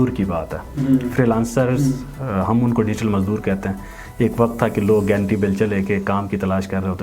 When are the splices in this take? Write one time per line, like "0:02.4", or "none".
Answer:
none